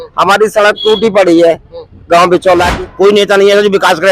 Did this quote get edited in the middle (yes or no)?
yes